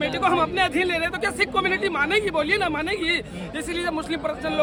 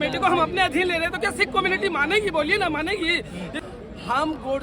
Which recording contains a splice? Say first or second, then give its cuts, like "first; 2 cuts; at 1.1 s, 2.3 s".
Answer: second; 1 cut; at 3.6 s